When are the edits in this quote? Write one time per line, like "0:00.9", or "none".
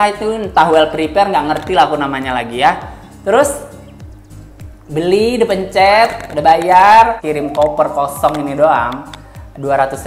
0:07.2